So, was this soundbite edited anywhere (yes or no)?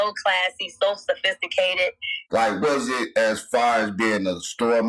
yes